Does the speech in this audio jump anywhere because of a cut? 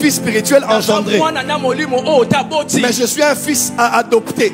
no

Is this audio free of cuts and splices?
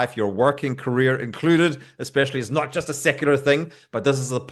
yes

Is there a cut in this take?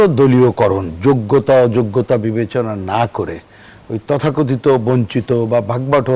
no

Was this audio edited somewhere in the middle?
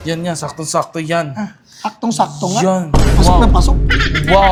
no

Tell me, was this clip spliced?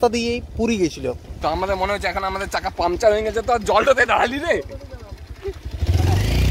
yes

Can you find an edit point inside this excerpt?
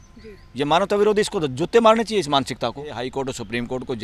yes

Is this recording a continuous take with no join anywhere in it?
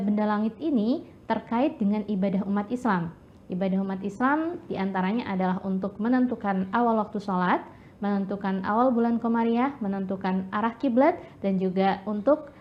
yes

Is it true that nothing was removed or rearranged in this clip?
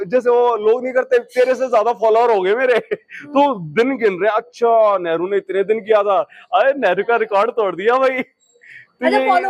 yes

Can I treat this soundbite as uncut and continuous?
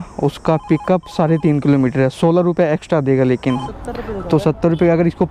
no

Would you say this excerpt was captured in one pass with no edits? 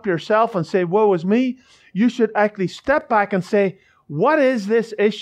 no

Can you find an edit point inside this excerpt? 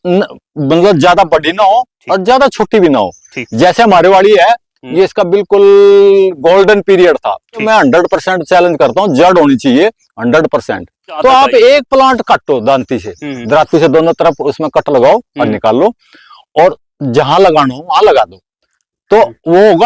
yes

